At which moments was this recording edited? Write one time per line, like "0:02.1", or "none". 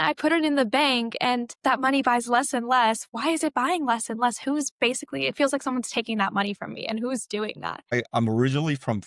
0:07.9